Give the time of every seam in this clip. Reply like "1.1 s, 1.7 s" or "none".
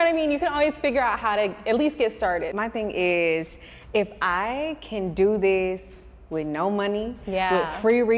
2.5 s

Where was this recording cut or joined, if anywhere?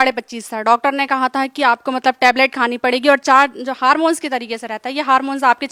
none

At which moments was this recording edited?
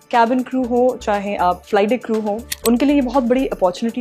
1.6 s, 2.5 s

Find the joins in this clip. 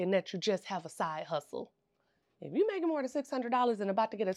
none

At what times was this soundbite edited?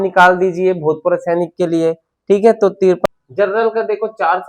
3.0 s

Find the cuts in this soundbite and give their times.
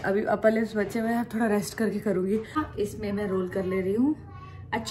2.6 s

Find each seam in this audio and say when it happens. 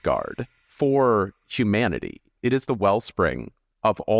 2.3 s

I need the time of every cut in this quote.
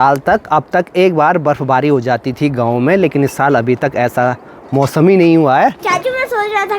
5.8 s

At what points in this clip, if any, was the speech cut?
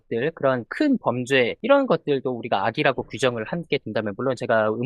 1.6 s

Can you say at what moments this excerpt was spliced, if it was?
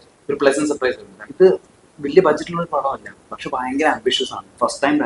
1.3 s

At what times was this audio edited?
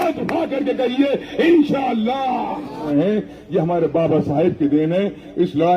2.9 s

